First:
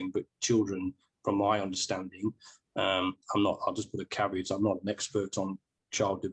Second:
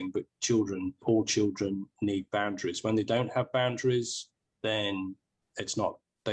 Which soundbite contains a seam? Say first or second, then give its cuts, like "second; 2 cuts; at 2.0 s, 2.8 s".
second; 2 cuts; at 1.0 s, 5.4 s